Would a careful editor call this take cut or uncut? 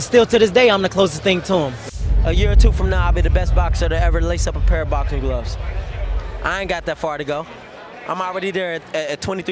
cut